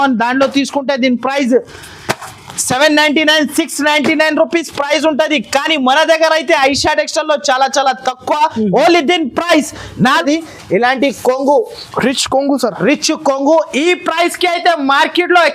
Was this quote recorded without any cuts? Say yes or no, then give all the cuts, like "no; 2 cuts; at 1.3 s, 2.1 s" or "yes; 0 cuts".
no; 1 cut; at 10.2 s